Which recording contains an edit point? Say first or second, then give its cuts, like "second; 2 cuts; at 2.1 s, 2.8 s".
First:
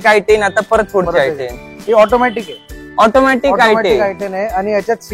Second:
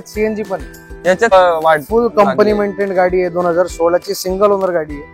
second; 1 cut; at 1.3 s